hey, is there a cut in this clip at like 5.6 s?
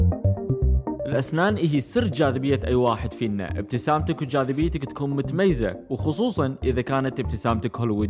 no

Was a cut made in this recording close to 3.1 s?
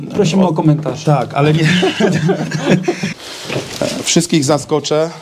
yes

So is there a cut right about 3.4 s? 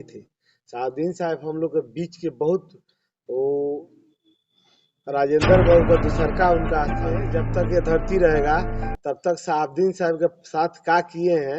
no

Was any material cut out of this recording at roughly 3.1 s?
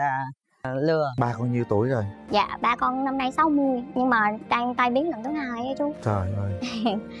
no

